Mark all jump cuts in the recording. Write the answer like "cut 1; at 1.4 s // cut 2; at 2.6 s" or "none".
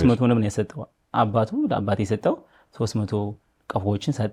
none